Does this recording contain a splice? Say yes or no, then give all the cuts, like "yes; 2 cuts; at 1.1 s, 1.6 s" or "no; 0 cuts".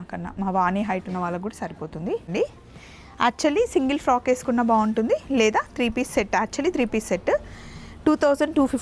yes; 1 cut; at 2.3 s